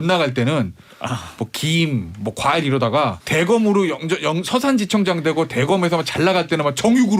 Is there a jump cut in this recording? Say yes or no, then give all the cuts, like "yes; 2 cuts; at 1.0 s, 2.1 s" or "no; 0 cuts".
yes; 1 cut; at 3.2 s